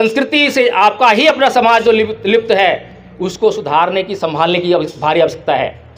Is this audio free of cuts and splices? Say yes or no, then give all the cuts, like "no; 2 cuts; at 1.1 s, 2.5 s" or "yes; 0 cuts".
yes; 0 cuts